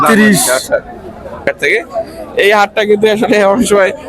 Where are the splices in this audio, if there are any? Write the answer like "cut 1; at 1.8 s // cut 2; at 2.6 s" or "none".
cut 1; at 1.5 s